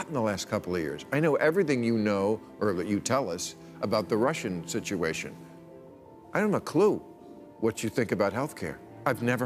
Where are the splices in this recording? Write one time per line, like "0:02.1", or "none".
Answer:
none